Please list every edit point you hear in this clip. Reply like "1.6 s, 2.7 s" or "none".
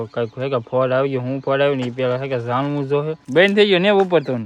3.2 s